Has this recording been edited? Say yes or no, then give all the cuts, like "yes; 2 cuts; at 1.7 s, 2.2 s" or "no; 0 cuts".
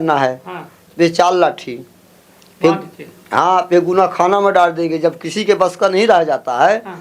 no; 0 cuts